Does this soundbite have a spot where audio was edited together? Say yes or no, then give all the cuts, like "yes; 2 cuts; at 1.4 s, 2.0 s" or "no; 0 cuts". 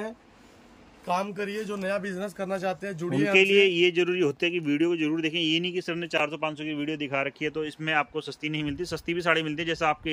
no; 0 cuts